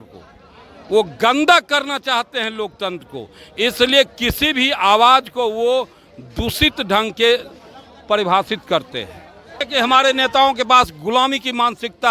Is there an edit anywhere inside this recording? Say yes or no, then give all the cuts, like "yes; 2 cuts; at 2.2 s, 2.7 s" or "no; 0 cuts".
yes; 1 cut; at 9.7 s